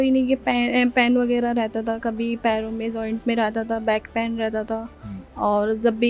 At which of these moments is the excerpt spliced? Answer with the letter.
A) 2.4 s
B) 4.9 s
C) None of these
C